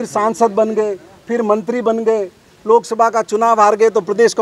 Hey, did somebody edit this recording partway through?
no; 0 cuts

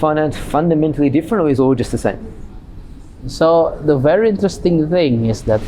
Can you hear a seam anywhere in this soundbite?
no; 0 cuts

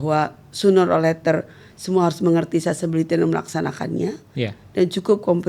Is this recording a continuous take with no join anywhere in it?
yes; 0 cuts

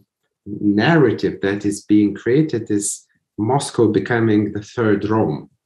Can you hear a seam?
no; 0 cuts

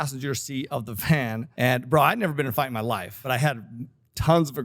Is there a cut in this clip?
yes; 2 cuts; at 1.5 s, 3.2 s

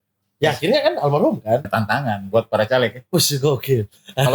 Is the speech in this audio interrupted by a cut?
yes; 1 cut; at 1.7 s

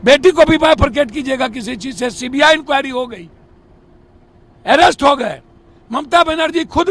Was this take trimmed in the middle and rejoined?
no; 0 cuts

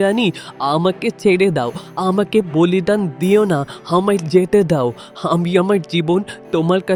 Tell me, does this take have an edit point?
no; 0 cuts

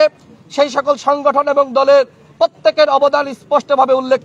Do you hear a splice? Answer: no; 0 cuts

